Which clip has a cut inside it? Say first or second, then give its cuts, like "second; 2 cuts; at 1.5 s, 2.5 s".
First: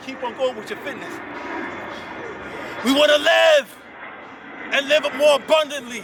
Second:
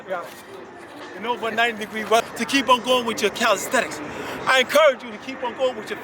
second; 1 cut; at 2.3 s